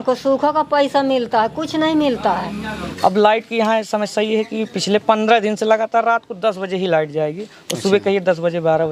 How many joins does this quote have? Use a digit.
1